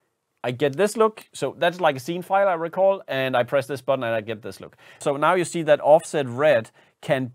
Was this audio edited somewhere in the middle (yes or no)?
yes